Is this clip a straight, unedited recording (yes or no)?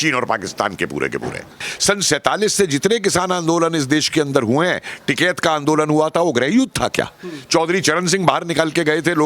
no